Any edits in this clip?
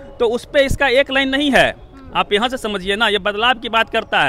no; 0 cuts

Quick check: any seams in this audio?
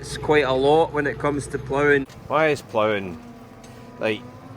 yes; 1 cut; at 2.1 s

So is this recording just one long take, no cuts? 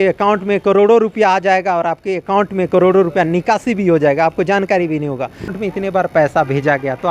no; 1 cut; at 5.5 s

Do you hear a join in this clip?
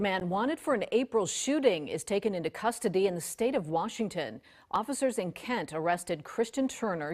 no; 0 cuts

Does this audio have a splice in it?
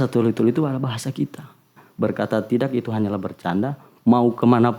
yes; 1 cut; at 1.7 s

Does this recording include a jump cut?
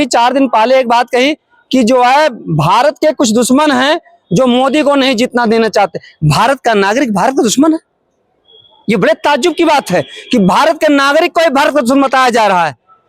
no; 0 cuts

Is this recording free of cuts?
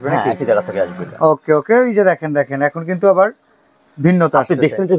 yes; 0 cuts

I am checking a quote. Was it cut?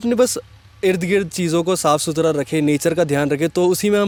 no; 0 cuts

